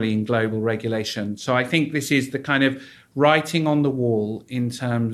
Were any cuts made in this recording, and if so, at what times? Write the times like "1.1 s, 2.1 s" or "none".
none